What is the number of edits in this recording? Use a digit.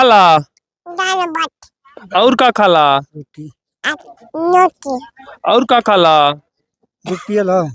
0